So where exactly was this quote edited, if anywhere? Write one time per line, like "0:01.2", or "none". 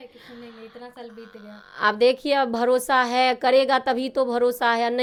none

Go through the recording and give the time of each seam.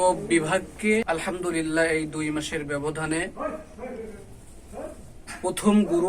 0:01.0

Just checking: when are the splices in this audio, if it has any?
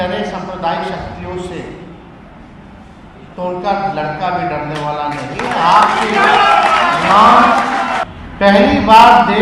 0:08.0

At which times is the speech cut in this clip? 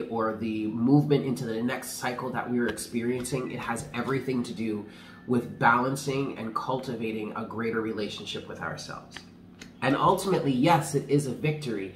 none

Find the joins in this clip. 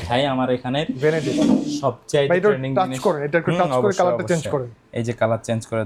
none

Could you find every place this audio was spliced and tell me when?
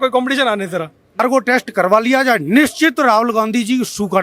0:01.2

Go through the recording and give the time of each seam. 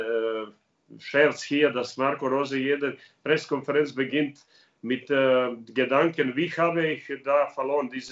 none

